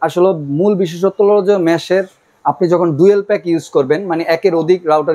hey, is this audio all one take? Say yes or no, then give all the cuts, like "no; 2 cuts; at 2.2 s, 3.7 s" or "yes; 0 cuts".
yes; 0 cuts